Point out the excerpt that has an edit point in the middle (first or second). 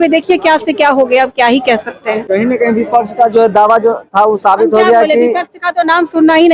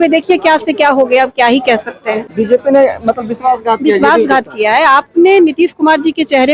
second